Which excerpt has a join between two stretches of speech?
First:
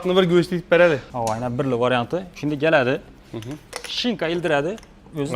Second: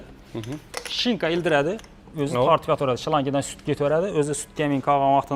first; 1 cut; at 1.1 s

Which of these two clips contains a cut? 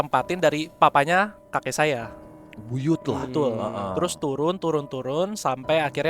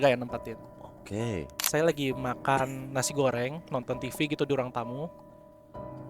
second; 1 cut; at 1.6 s

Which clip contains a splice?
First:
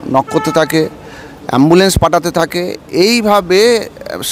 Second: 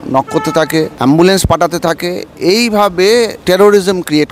second; 2 cuts; at 0.9 s, 3.4 s

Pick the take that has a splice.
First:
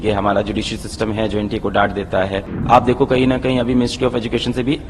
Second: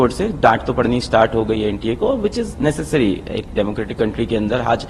first; 1 cut; at 2.5 s

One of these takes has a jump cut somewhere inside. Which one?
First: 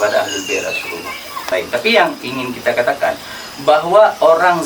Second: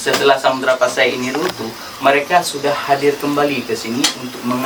first; 1 cut; at 1.5 s

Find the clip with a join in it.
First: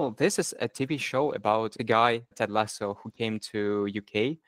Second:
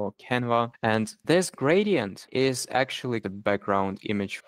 second; 3 cuts; at 1.1 s, 2.2 s, 3.2 s

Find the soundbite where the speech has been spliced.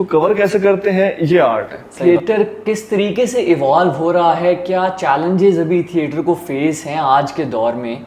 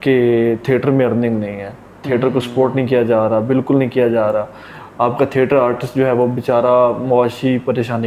first; 1 cut; at 1.8 s

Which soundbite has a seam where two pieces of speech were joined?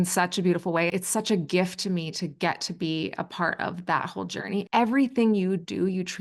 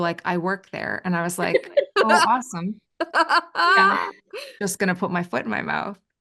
first; 2 cuts; at 0.9 s, 4.7 s

